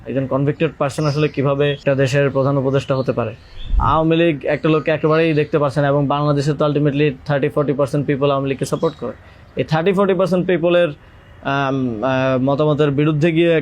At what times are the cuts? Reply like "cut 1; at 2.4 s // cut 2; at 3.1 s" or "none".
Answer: cut 1; at 1.8 s // cut 2; at 3.7 s

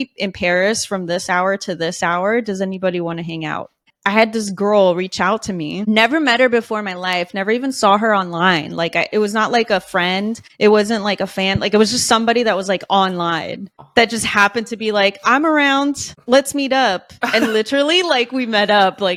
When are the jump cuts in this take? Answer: none

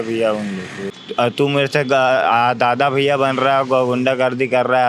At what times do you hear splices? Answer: cut 1; at 0.9 s

